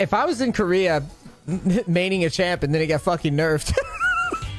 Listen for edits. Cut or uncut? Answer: uncut